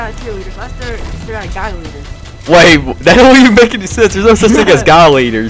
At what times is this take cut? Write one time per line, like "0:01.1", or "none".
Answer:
none